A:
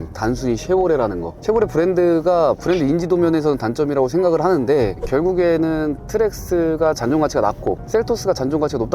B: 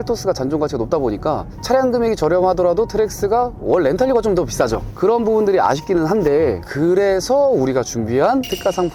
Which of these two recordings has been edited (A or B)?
A